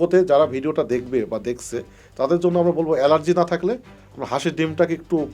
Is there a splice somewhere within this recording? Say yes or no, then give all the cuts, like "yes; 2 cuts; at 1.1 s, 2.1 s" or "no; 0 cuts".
no; 0 cuts